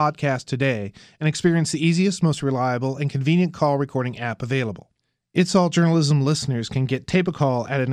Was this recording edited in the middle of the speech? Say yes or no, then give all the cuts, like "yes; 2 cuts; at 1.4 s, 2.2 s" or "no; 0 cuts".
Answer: no; 0 cuts